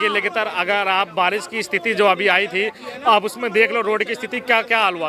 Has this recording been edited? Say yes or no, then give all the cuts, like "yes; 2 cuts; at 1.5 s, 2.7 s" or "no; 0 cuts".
no; 0 cuts